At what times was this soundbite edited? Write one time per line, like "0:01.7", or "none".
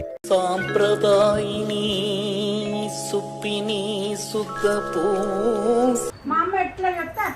0:06.1